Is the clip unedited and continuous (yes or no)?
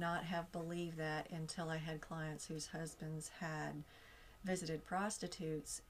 yes